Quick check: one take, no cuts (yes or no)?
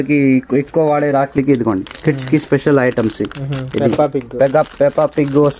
no